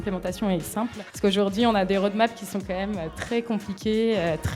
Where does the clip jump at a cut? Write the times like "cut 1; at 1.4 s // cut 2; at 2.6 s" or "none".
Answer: cut 1; at 1.0 s